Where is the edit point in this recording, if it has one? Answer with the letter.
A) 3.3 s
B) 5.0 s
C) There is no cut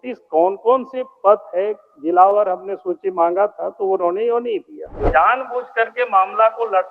B